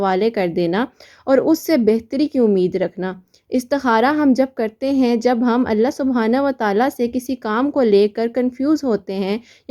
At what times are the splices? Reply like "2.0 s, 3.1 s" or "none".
none